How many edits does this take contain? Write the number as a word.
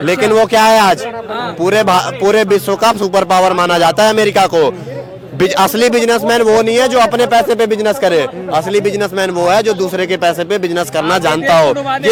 zero